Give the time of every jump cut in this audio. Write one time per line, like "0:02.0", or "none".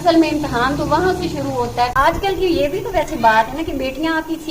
0:01.9